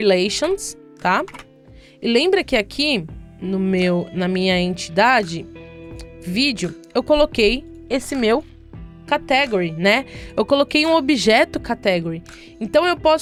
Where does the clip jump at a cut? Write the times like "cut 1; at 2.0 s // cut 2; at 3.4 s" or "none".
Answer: none